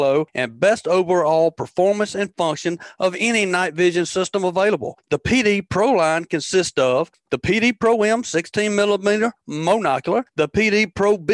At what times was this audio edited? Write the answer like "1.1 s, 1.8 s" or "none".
none

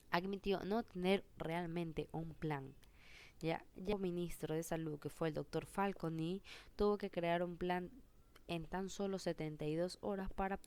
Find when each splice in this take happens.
3.9 s

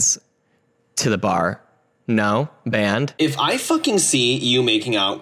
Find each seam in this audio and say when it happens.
3.1 s

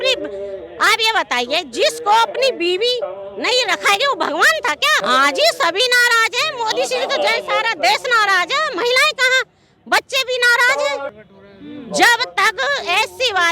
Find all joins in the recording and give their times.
5.0 s, 11.2 s

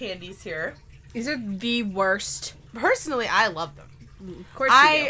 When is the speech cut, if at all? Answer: 2.6 s

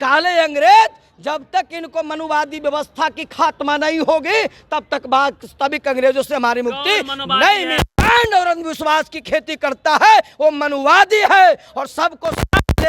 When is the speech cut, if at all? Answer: none

